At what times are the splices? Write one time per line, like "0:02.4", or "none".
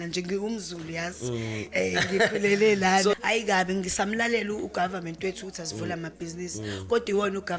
0:03.1